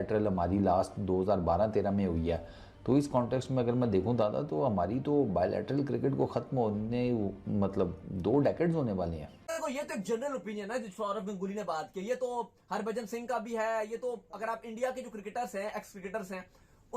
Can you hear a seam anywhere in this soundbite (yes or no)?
yes